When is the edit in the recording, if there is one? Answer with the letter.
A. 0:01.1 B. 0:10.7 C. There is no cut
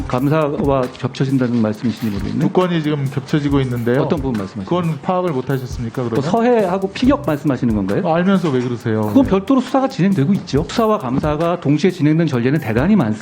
B